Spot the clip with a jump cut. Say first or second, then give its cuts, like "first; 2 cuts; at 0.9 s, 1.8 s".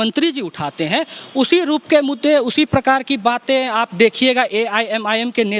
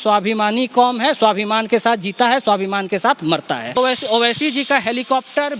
second; 1 cut; at 3.8 s